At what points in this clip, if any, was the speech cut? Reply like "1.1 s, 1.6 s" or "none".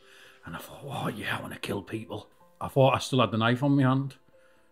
2.4 s